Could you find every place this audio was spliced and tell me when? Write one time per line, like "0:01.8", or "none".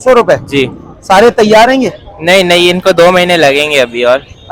none